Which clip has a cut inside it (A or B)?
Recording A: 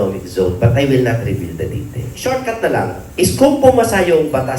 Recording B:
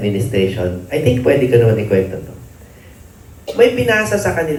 A